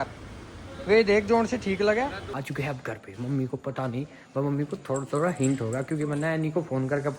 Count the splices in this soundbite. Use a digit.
1